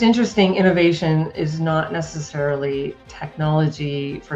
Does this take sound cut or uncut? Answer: uncut